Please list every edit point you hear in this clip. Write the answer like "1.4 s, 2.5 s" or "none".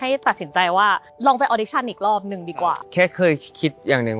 1.1 s, 2.8 s